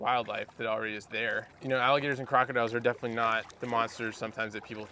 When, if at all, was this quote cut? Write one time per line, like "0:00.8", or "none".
0:01.5
0:03.5